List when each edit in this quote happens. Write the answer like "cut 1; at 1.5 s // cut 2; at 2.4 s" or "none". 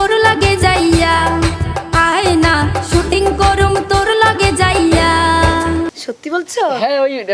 cut 1; at 5.9 s